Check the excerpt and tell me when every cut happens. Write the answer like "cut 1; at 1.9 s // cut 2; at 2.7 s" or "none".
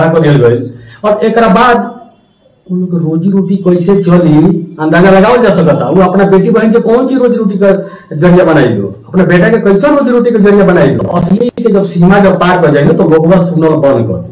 cut 1; at 11.6 s

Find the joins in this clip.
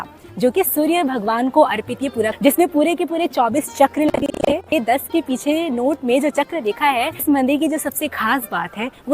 cut 1; at 2.4 s // cut 2; at 4.7 s // cut 3; at 7.2 s

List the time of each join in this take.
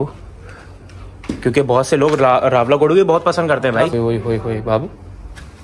cut 1; at 3.9 s

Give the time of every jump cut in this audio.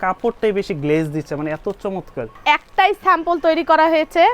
cut 1; at 2.4 s

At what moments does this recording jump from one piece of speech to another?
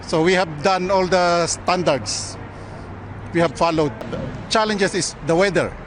cut 1; at 4.1 s

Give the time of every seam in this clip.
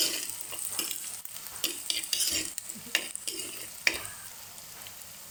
none

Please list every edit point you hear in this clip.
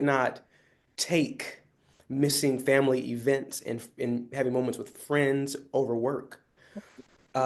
none

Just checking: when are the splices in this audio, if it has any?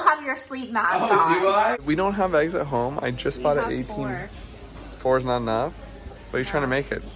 cut 1; at 1.8 s

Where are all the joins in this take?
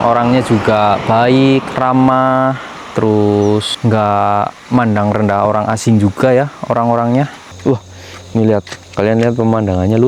cut 1; at 3.7 s // cut 2; at 7.5 s

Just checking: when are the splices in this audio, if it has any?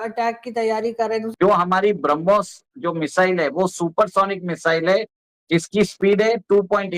cut 1; at 1.3 s

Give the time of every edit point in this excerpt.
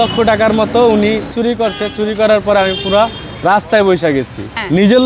none

